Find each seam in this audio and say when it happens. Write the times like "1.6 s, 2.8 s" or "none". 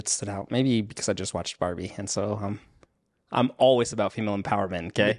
none